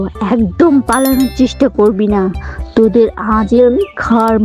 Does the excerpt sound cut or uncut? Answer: uncut